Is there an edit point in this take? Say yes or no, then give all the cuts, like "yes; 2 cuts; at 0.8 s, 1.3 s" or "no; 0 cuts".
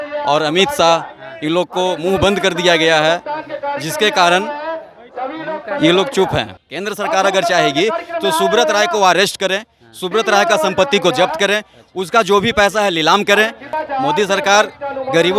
yes; 2 cuts; at 6.5 s, 13.7 s